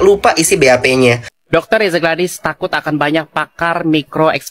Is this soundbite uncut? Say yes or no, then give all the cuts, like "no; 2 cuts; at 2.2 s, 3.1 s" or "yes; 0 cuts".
no; 1 cut; at 1.3 s